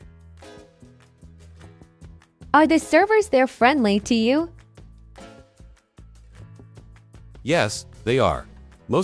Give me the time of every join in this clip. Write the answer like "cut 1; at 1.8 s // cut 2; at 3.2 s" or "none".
cut 1; at 1.9 s // cut 2; at 4.6 s // cut 3; at 7.4 s